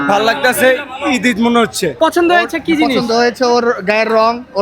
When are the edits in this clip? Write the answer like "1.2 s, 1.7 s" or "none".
1.9 s